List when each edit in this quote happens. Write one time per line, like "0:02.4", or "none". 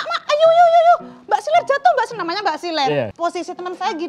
0:03.1